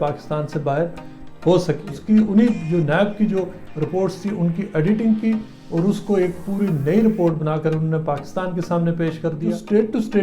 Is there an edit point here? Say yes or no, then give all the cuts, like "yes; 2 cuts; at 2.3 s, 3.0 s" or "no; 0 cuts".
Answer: yes; 2 cuts; at 1.9 s, 9.4 s